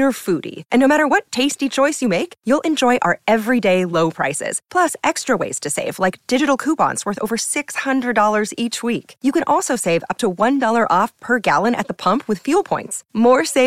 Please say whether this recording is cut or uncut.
uncut